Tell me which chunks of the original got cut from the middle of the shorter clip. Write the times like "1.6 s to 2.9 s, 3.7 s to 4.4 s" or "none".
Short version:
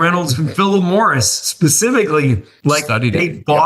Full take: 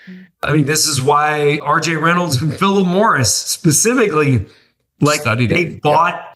4.5 s to 4.8 s